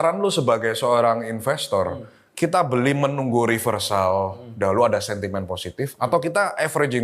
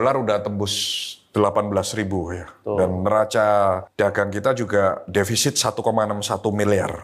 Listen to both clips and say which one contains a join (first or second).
second